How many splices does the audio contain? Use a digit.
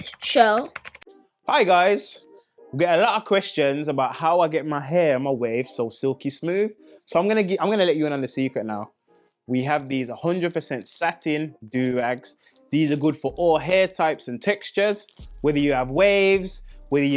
1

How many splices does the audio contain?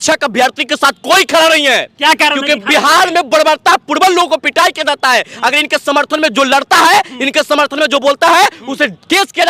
0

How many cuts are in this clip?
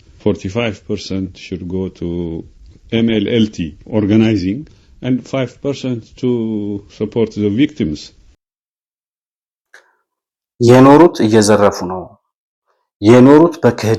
0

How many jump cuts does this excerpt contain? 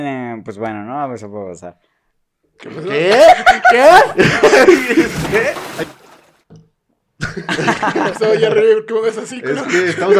1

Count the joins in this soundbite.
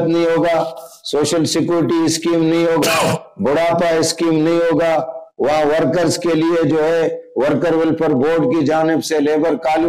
0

